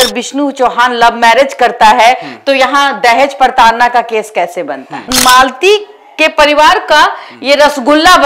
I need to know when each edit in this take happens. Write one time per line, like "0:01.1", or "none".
0:05.1